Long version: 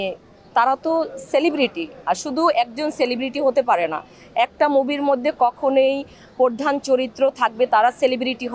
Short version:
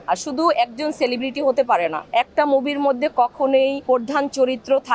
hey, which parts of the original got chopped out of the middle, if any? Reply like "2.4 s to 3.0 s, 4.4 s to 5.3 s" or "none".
4.0 s to 4.2 s, 6.0 s to 6.3 s